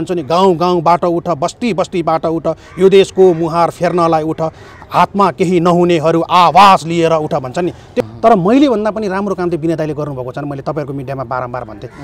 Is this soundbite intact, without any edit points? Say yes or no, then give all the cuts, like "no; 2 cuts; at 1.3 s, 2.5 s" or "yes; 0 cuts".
no; 1 cut; at 8.0 s